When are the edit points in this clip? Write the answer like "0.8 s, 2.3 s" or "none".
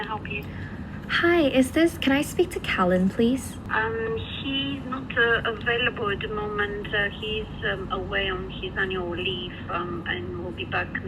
none